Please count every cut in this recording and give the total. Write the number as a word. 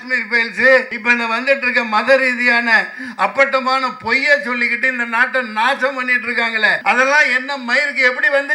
two